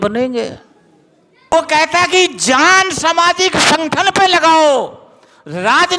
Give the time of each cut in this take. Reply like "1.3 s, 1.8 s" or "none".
1.5 s